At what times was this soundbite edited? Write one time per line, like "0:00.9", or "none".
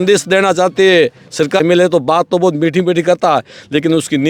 0:01.6